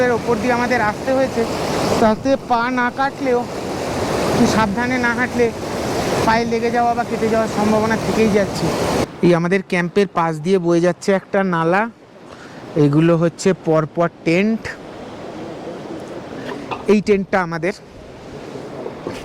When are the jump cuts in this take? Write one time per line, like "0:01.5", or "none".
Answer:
0:09.0